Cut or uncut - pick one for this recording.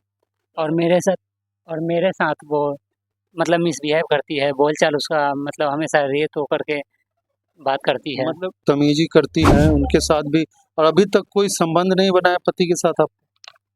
cut